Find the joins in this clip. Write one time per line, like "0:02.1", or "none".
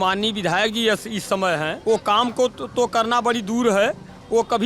0:01.8